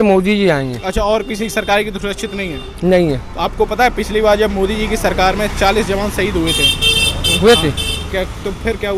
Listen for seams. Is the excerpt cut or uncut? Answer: uncut